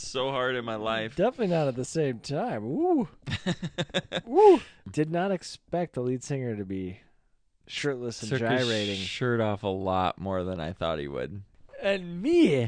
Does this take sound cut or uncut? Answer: cut